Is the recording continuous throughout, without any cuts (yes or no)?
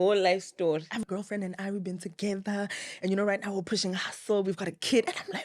no